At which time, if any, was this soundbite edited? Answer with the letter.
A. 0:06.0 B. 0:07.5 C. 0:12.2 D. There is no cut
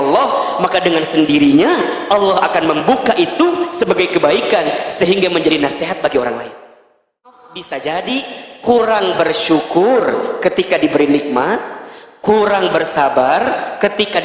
B